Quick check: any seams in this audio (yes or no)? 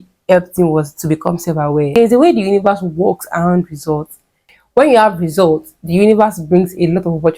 yes